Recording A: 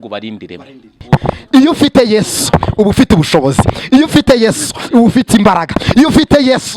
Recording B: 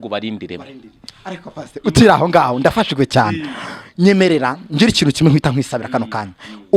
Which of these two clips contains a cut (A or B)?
A